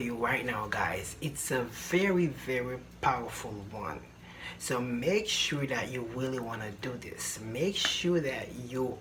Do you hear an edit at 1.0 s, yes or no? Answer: no